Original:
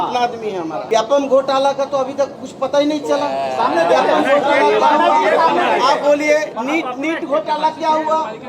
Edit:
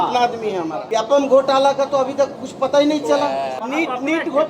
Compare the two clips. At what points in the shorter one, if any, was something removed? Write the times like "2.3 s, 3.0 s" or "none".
3.5 s